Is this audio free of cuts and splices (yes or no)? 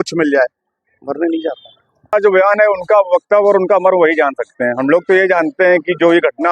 no